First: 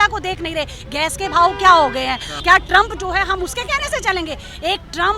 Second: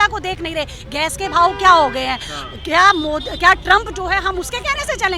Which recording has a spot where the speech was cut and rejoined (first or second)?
first